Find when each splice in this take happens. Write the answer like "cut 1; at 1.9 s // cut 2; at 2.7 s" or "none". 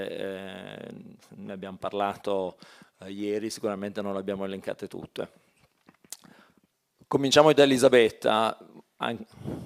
cut 1; at 4.0 s